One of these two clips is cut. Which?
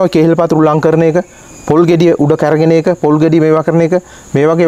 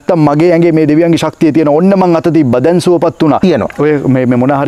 second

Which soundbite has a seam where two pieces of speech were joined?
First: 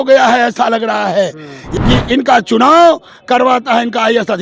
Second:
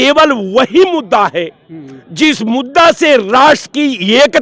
first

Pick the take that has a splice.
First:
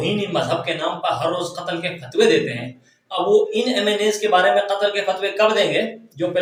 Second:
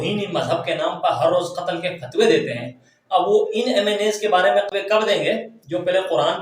second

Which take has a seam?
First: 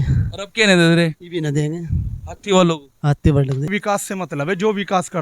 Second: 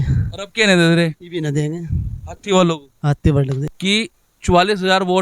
first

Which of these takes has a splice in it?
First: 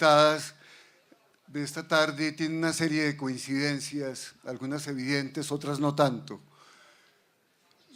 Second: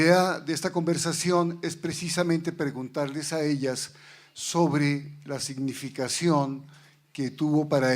second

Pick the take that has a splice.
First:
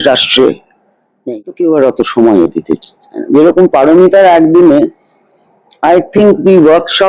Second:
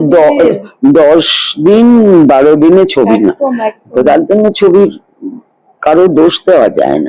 first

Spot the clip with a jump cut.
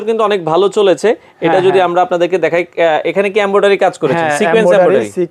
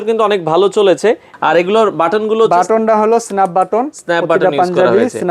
second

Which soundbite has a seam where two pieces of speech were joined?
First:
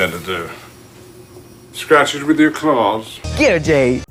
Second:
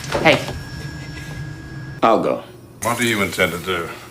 second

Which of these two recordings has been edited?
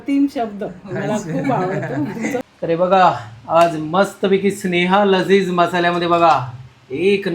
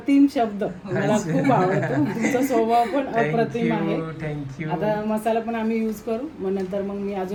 first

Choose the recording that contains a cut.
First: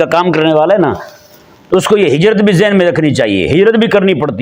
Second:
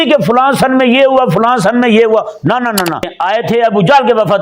second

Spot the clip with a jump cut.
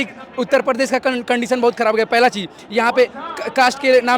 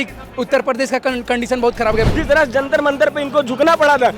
second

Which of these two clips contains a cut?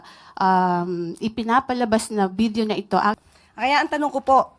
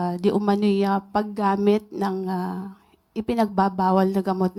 first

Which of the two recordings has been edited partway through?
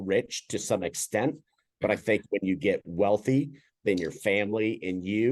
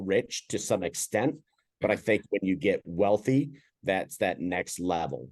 second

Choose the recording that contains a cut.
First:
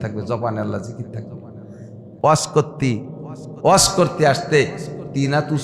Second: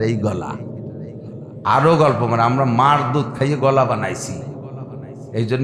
first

